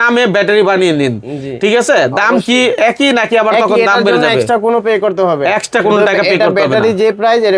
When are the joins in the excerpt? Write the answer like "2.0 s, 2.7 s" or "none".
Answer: none